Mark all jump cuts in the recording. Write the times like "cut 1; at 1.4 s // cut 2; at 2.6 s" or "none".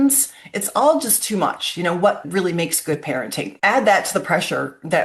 cut 1; at 2.2 s // cut 2; at 3.5 s